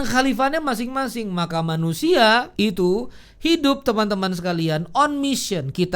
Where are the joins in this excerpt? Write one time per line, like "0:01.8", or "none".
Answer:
0:02.7